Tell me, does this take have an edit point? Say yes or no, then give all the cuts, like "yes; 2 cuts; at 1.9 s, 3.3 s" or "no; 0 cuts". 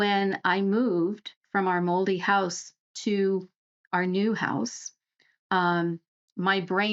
no; 0 cuts